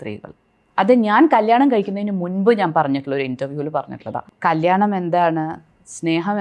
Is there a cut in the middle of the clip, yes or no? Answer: yes